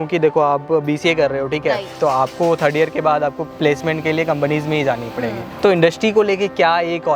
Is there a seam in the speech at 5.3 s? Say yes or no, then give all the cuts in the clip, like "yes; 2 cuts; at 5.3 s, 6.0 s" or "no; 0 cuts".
no; 0 cuts